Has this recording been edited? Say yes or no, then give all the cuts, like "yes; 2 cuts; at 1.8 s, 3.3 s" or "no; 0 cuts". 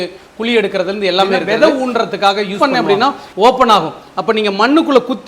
yes; 2 cuts; at 1.4 s, 2.5 s